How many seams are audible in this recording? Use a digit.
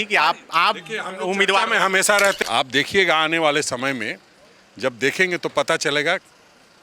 1